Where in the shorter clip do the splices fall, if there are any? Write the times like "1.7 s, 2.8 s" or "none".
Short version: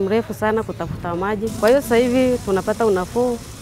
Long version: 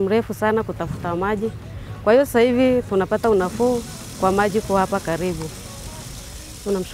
1.5 s